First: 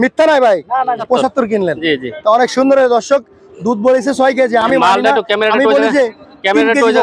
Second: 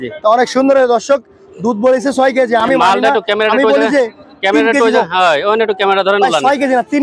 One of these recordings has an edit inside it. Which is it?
first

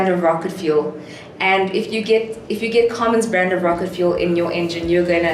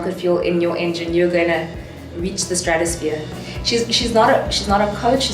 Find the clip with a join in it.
second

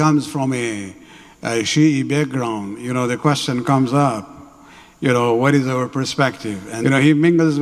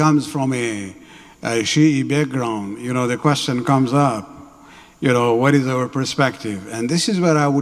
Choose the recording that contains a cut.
first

